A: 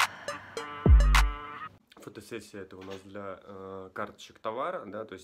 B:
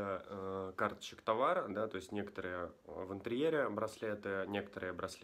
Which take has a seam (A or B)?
A